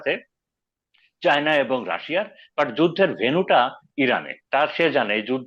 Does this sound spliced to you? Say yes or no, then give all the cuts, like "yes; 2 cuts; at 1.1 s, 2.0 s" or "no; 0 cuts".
yes; 1 cut; at 4.3 s